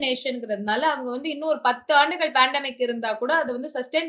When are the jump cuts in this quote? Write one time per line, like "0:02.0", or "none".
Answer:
none

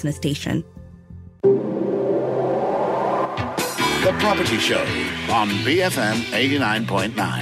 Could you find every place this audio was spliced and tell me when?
0:00.9

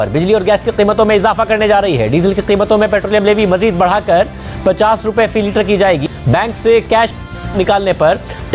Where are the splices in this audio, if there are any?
none

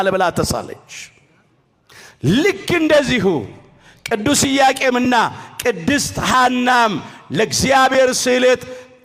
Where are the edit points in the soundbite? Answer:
none

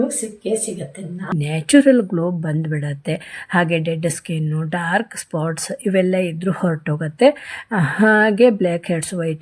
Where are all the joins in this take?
0:01.4

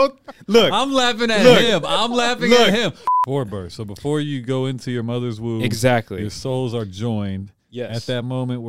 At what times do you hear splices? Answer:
0:03.0

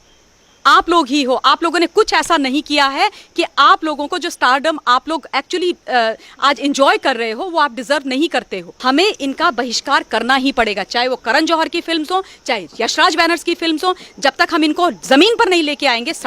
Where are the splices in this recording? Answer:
0:08.6

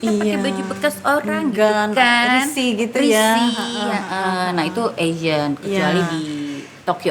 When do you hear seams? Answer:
none

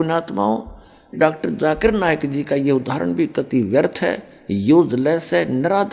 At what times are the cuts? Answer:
0:01.2

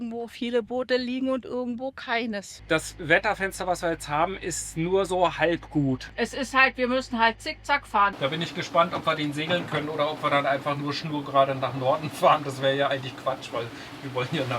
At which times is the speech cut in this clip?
0:02.5
0:08.2

